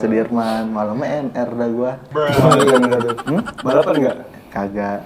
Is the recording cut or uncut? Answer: uncut